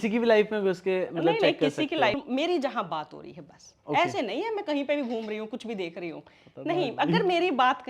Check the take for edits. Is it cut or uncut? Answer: cut